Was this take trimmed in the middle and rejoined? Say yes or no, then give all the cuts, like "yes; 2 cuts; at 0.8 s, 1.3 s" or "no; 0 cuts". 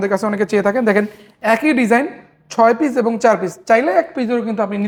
no; 0 cuts